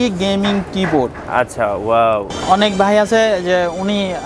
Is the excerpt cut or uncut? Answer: cut